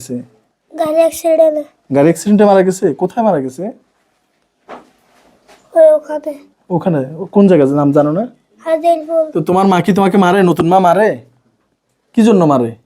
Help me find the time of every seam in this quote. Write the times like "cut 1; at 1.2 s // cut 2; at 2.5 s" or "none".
cut 1; at 9.3 s